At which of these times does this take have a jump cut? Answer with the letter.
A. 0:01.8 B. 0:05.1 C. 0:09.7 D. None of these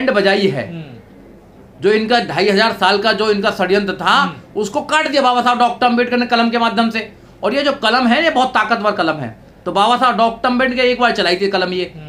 D